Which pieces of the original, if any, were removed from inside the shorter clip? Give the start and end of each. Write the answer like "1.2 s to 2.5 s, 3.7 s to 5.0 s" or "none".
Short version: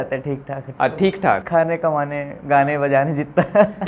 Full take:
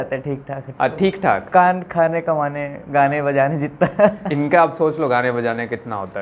1.4 s to 1.9 s